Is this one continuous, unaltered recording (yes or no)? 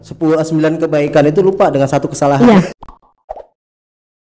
no